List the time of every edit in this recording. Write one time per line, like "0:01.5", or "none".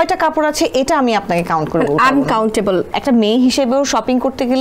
0:02.9

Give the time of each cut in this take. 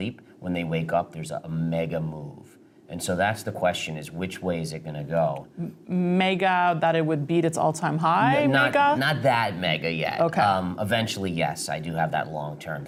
none

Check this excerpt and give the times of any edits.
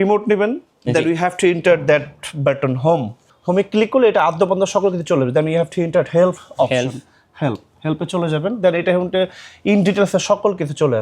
0:03.2

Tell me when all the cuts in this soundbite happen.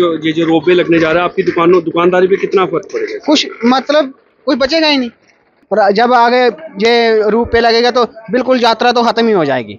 0:05.5

